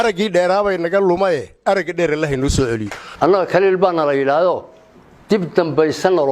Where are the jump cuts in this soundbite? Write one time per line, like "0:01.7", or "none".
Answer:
0:03.0